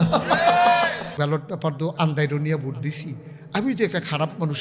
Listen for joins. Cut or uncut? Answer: cut